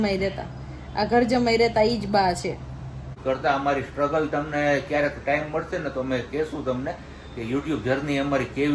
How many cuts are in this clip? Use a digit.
1